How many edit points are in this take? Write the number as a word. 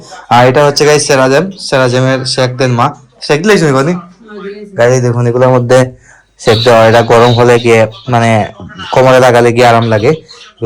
zero